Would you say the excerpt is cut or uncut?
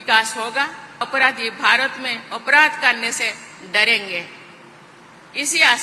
cut